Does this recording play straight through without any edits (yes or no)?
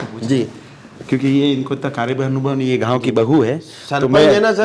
yes